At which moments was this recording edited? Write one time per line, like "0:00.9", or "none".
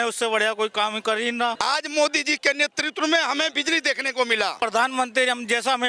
0:01.6
0:04.6